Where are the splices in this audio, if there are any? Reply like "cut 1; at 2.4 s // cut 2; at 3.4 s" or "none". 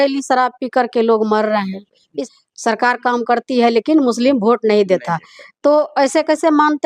cut 1; at 2.2 s